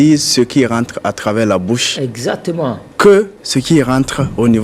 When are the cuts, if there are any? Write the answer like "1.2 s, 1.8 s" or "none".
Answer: 2.8 s, 3.4 s